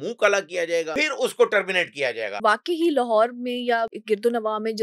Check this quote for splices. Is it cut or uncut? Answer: cut